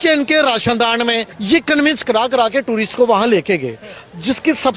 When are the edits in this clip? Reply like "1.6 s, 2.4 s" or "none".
1.3 s